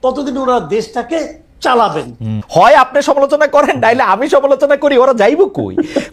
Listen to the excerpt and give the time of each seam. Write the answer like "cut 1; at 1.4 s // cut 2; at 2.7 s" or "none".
cut 1; at 2.4 s